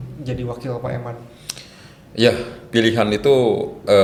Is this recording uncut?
yes; 0 cuts

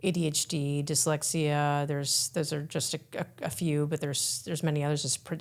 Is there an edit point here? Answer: no; 0 cuts

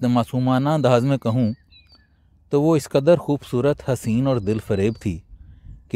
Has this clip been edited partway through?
no; 0 cuts

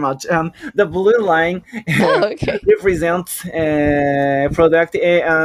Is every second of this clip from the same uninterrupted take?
yes; 0 cuts

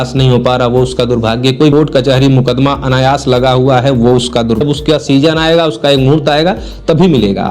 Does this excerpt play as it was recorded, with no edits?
no; 2 cuts; at 1.7 s, 4.6 s

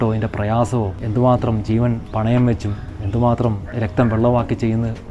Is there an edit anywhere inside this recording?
yes; 2 cuts; at 1.0 s, 3.7 s

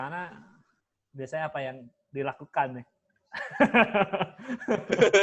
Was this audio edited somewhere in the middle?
no; 0 cuts

